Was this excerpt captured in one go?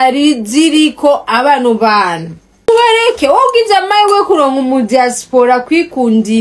no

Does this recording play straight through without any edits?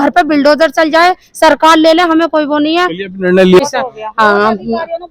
no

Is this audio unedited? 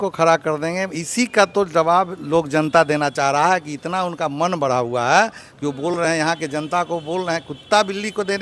yes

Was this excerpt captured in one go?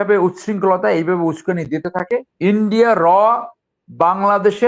no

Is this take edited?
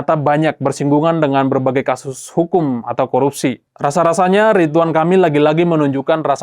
yes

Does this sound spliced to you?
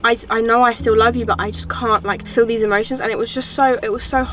yes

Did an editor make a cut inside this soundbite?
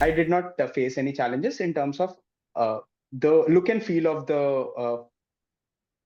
no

